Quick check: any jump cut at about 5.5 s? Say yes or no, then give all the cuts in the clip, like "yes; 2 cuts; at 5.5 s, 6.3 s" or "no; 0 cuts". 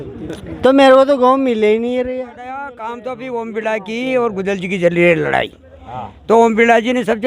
no; 1 cut; at 2.7 s